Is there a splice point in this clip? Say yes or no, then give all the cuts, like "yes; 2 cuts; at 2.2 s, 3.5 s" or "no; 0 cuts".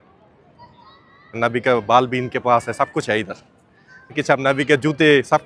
yes; 2 cuts; at 1.4 s, 4.1 s